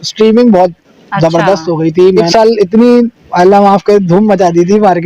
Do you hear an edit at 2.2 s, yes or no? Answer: yes